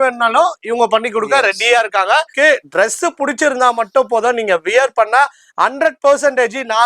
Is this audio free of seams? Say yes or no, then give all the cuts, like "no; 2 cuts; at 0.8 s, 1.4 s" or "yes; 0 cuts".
no; 1 cut; at 2.3 s